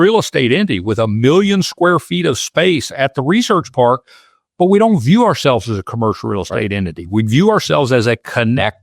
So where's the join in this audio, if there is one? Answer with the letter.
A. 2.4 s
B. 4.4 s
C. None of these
C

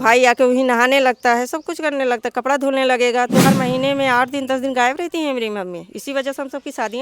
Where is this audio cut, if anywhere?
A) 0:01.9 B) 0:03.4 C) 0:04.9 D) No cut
B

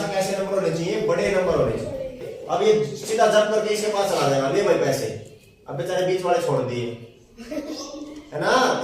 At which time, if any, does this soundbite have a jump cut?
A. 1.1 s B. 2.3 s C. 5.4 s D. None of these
B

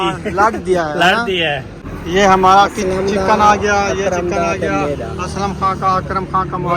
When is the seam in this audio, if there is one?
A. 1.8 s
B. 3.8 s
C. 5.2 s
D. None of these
A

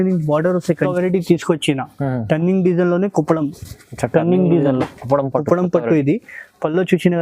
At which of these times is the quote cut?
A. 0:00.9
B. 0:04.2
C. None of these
A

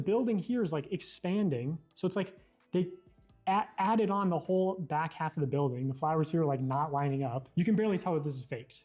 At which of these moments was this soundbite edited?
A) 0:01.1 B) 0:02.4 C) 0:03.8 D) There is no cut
D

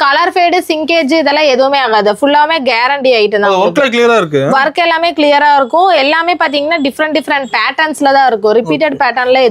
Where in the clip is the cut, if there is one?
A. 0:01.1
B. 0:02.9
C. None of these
C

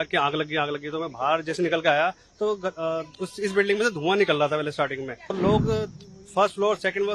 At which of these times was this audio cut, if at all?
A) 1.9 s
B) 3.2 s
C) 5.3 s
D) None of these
C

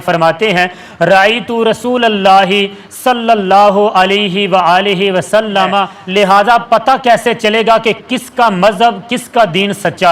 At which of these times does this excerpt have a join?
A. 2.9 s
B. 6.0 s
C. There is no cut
B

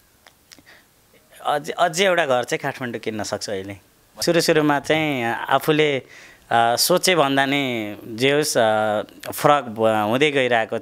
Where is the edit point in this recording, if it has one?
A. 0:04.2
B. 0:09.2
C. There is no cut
A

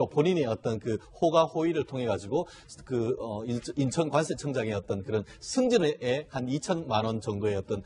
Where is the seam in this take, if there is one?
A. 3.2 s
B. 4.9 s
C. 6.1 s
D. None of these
B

